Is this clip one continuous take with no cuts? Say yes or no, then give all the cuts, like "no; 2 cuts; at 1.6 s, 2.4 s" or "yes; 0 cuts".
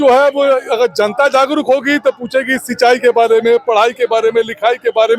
yes; 0 cuts